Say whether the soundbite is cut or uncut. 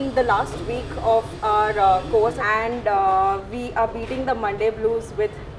cut